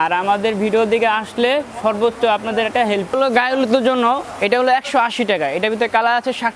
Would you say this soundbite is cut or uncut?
cut